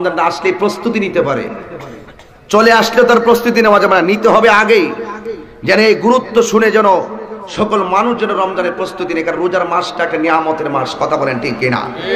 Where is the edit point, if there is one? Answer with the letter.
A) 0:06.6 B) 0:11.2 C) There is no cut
C